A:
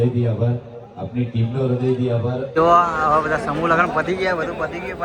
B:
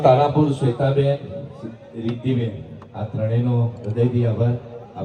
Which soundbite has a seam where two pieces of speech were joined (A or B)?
A